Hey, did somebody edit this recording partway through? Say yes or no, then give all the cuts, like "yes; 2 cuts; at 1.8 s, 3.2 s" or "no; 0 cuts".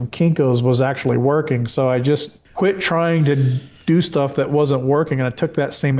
yes; 1 cut; at 2.4 s